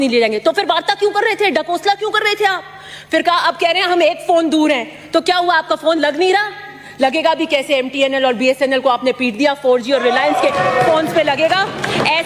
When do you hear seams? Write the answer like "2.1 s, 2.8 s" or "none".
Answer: none